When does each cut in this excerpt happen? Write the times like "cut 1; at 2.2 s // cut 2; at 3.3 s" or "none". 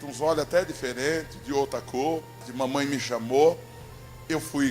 cut 1; at 2.4 s